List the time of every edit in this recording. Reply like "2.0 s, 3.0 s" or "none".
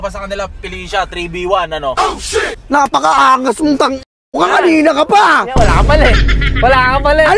none